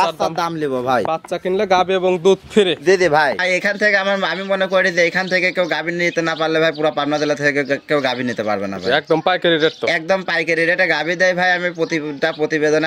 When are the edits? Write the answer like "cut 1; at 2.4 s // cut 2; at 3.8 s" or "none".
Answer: cut 1; at 3.4 s